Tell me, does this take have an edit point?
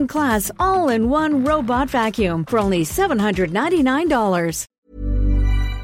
yes; 1 cut; at 4.7 s

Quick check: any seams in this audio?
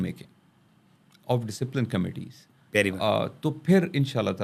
no; 0 cuts

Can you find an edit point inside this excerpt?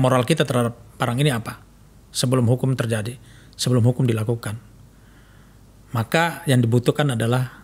no; 0 cuts

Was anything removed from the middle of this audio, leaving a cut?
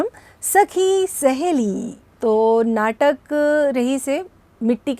yes; 1 cut; at 2.0 s

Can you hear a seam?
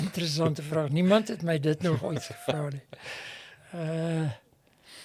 no; 0 cuts

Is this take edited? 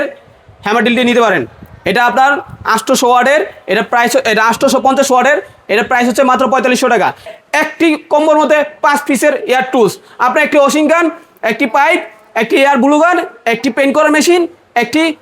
yes; 1 cut; at 7.3 s

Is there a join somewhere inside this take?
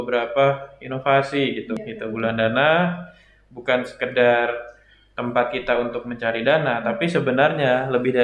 yes; 1 cut; at 1.7 s

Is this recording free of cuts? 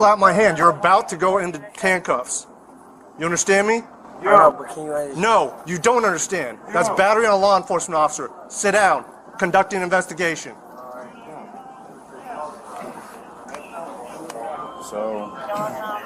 yes; 0 cuts

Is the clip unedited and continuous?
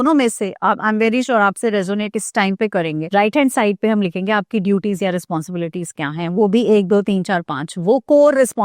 no; 1 cut; at 3.0 s

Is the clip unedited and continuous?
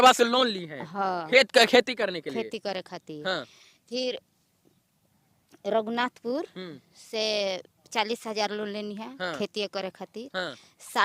yes; 0 cuts

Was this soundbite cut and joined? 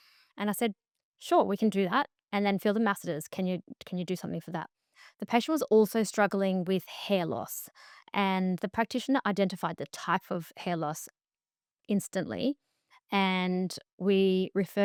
no; 0 cuts

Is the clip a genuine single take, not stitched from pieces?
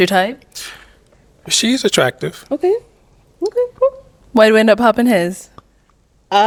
yes; 0 cuts

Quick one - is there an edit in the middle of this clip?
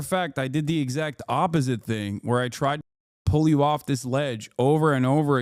no; 0 cuts

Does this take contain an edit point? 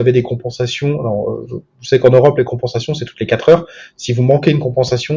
no; 0 cuts

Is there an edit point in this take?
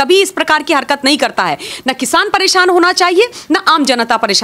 yes; 1 cut; at 1.7 s

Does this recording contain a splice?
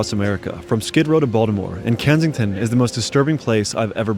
no; 0 cuts

